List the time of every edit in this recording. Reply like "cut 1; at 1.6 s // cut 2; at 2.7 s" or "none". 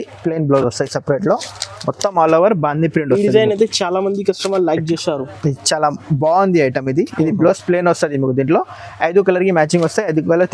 none